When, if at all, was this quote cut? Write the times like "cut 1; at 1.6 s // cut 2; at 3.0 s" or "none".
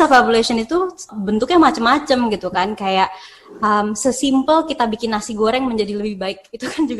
cut 1; at 1.1 s